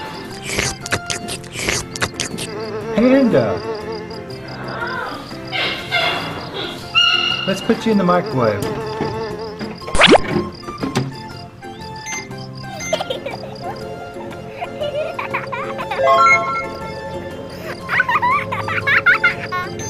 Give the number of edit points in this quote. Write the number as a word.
one